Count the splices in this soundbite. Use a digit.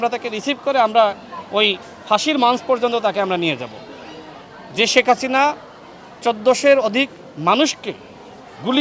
0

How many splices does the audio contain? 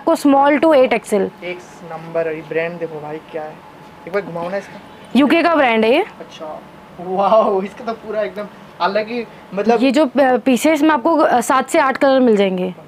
1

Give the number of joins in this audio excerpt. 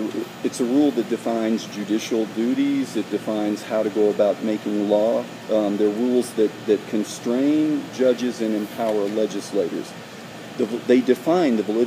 1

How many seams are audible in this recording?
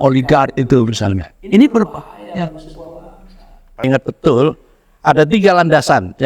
1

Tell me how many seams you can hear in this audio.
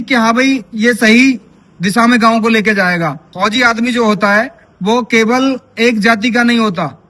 1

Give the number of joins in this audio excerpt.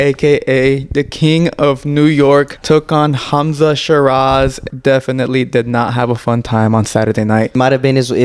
3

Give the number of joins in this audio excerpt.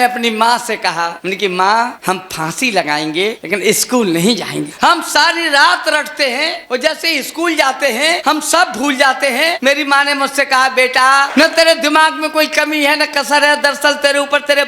8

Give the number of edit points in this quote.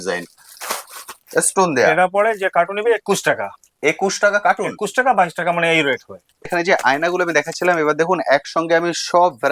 1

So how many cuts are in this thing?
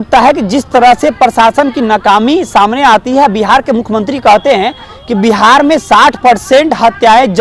0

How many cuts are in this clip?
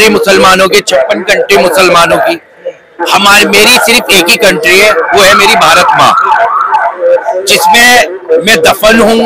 0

